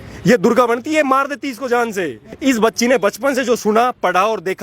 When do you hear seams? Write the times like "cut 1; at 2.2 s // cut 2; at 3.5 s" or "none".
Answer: cut 1; at 2.2 s